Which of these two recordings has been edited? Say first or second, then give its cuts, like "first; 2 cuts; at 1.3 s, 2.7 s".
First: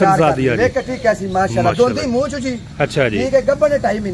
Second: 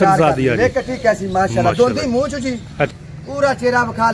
second; 1 cut; at 2.9 s